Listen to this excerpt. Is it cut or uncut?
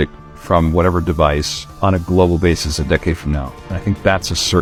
uncut